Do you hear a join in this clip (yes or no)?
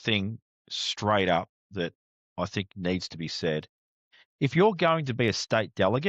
yes